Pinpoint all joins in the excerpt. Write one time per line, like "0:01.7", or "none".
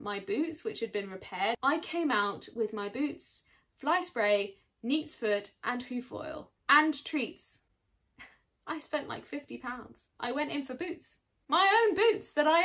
0:01.6
0:06.5

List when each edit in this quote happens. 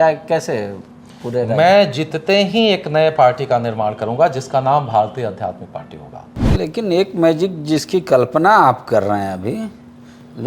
0:06.5

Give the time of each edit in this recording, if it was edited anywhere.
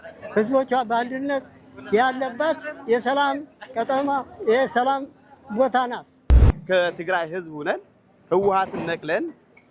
0:06.3

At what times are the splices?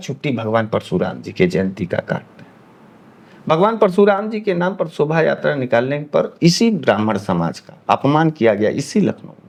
none

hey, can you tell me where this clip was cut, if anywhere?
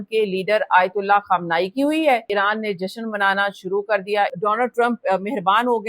0:02.3
0:04.3

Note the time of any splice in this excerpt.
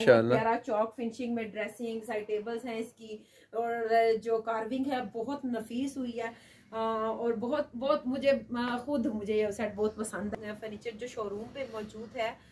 0:10.3

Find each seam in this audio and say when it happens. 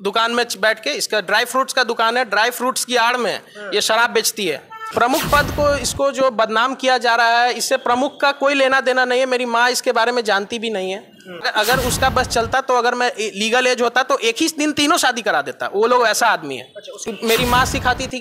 0:04.7
0:11.4
0:16.9

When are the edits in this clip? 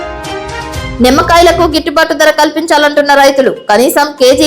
none

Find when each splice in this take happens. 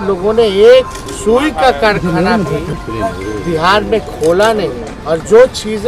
0:01.0
0:02.8
0:04.9

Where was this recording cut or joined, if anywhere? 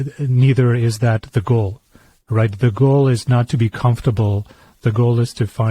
0:04.7

